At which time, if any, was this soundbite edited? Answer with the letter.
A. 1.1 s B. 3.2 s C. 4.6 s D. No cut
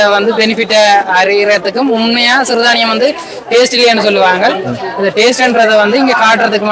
D